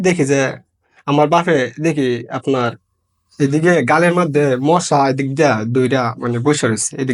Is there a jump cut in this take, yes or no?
no